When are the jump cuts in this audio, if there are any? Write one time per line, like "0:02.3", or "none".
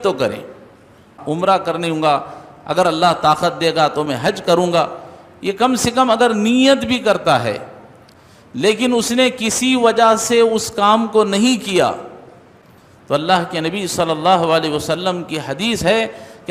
0:01.1